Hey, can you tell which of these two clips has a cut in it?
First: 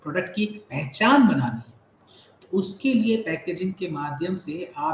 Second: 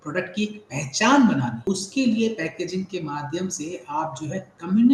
second; 1 cut; at 1.6 s

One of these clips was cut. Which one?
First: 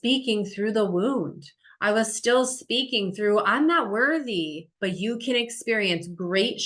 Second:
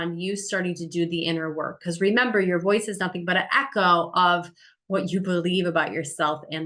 first; 1 cut; at 4.7 s

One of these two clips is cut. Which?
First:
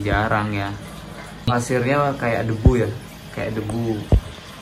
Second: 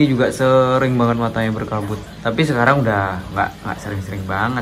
first; 1 cut; at 1.5 s

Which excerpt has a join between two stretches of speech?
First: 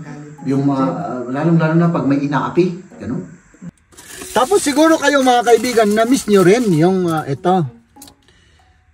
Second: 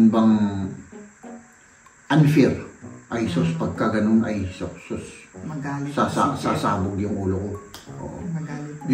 first; 1 cut; at 3.6 s

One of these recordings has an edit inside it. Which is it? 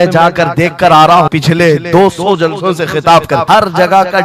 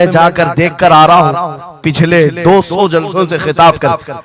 first; 2 cuts; at 1.3 s, 3.4 s

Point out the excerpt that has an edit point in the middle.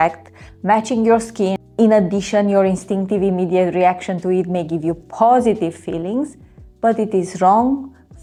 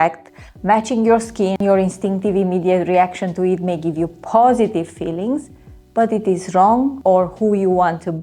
second; 2 cuts; at 1.6 s, 7.4 s

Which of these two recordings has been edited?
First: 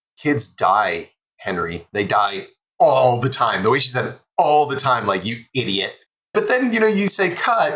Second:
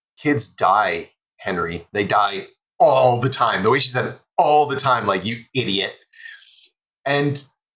first; 1 cut; at 6.3 s

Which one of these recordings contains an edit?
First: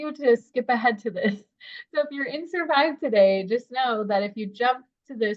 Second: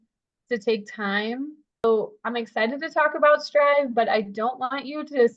second; 1 cut; at 1.8 s

